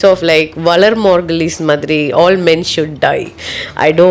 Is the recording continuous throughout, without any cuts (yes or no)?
yes